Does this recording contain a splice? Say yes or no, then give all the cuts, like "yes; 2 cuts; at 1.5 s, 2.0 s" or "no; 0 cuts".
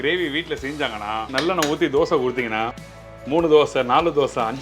yes; 1 cut; at 1.3 s